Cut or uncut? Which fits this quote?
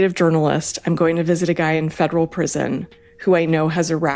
uncut